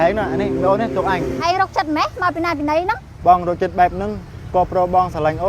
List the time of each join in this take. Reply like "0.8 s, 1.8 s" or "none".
1.4 s